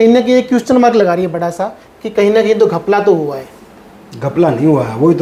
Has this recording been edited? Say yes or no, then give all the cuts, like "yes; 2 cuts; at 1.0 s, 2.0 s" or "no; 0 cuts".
no; 0 cuts